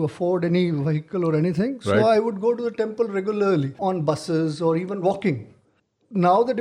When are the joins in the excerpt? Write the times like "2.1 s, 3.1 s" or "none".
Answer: 3.8 s